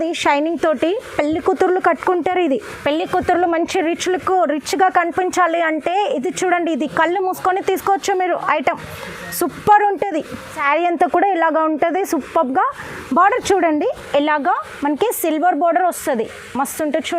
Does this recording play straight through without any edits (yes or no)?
no